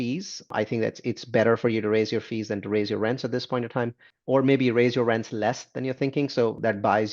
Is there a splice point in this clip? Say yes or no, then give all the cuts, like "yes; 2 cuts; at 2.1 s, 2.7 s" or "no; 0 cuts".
no; 0 cuts